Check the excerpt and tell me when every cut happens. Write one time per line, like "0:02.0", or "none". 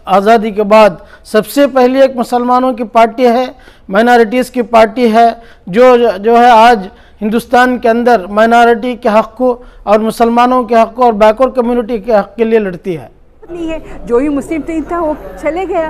0:13.5